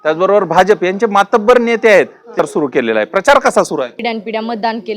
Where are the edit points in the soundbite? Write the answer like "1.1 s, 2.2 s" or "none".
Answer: 2.4 s, 4.0 s

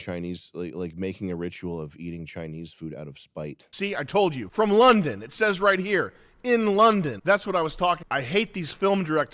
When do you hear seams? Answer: 3.7 s, 4.4 s, 7.1 s, 8.1 s

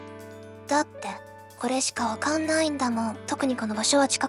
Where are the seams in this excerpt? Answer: 3.2 s

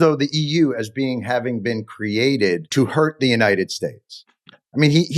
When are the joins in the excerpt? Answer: 2.7 s

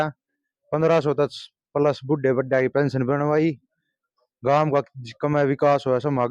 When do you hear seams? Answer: none

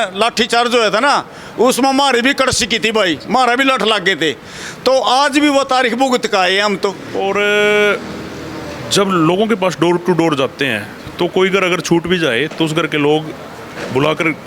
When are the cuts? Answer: 7.1 s

